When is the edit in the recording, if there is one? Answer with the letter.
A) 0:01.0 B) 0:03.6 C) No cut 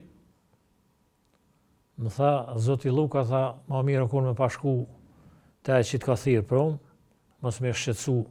C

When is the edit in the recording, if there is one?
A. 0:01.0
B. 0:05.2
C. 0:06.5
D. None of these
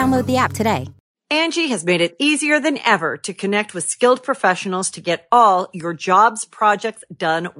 A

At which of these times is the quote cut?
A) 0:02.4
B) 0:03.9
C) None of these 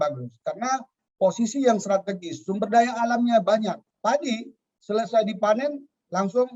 B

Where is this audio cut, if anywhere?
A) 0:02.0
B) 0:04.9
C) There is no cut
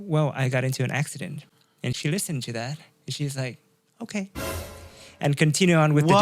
A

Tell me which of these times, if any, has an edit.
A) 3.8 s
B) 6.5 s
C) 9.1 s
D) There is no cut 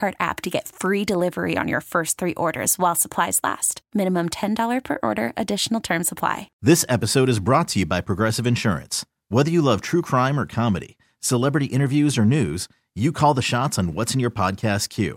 B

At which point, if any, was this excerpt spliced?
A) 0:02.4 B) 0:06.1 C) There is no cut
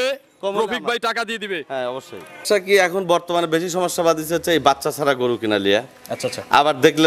A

